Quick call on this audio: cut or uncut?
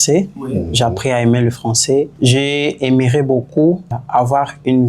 cut